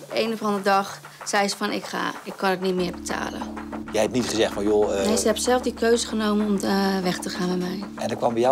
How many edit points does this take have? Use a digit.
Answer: 1